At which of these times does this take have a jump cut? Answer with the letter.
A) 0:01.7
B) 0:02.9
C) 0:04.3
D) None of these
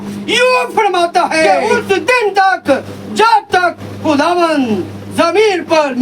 A